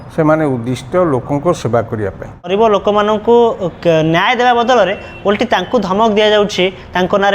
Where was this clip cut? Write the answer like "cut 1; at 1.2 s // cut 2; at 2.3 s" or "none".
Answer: cut 1; at 2.5 s